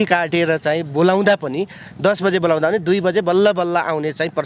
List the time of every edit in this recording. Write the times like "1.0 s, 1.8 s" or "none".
none